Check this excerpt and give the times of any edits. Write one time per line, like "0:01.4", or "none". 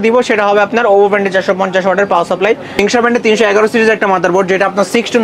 0:02.8